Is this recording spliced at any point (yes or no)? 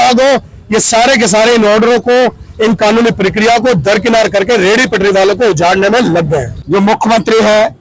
yes